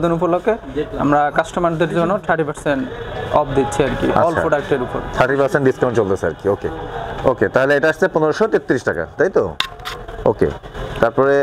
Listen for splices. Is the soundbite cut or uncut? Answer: uncut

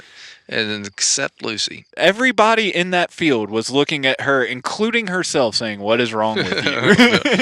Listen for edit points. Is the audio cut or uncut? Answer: cut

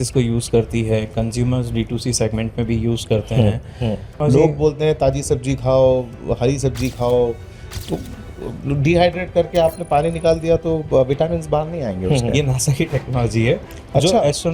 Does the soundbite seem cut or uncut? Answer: cut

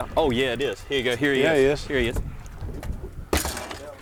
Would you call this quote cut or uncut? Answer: uncut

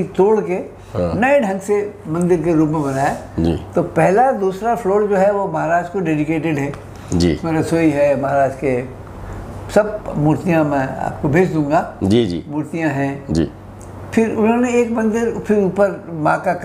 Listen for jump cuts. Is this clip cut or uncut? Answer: uncut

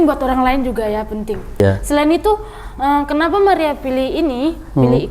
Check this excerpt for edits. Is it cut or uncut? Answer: cut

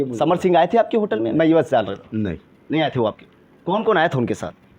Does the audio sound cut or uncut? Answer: uncut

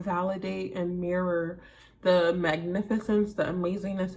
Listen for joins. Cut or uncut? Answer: uncut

